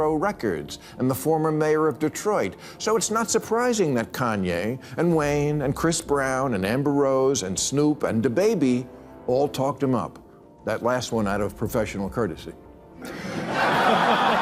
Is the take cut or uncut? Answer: uncut